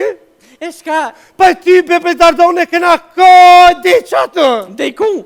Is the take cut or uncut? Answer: uncut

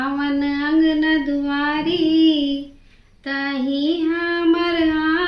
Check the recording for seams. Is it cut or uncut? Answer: uncut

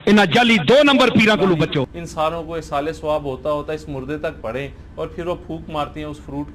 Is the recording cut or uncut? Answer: cut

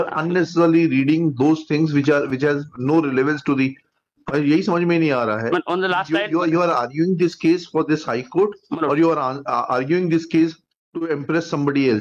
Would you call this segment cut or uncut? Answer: uncut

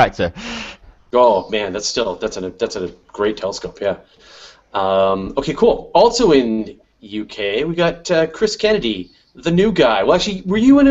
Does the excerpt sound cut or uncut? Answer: cut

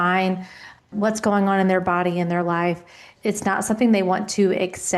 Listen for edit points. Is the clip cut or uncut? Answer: cut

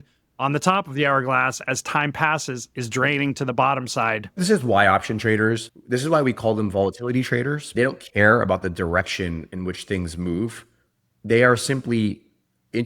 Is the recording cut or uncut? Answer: cut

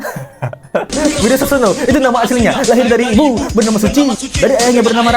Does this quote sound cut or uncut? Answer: uncut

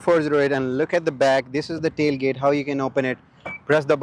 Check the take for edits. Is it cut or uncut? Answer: uncut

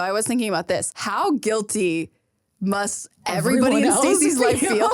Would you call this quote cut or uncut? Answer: cut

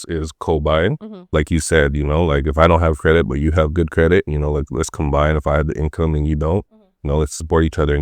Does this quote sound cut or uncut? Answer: uncut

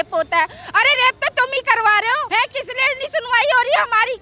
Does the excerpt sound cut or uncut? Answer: cut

